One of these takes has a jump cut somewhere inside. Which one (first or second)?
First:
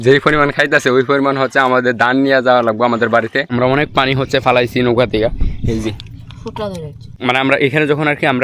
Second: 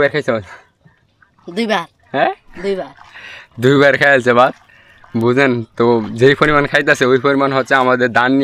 first